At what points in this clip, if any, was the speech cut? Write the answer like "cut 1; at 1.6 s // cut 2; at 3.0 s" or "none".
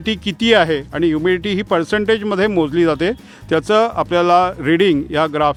none